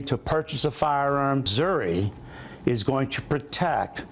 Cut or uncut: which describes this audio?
cut